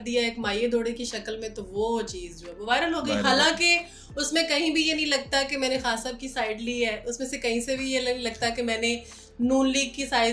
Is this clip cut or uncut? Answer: uncut